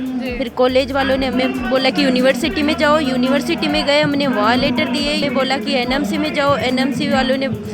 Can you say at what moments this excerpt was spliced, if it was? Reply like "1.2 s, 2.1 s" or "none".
5.2 s